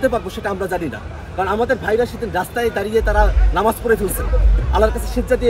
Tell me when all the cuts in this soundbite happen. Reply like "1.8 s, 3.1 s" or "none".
none